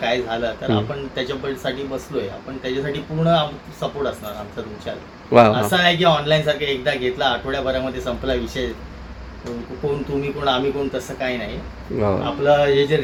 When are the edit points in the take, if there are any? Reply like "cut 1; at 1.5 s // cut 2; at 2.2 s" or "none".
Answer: none

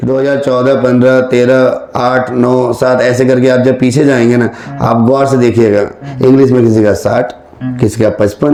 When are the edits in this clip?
none

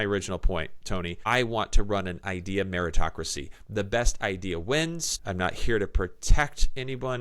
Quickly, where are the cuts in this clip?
cut 1; at 1.2 s // cut 2; at 5.1 s

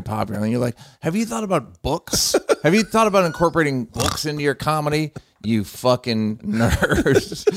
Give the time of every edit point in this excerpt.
cut 1; at 3.9 s // cut 2; at 6.4 s

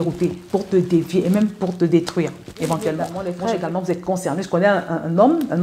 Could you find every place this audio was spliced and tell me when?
cut 1; at 3.1 s

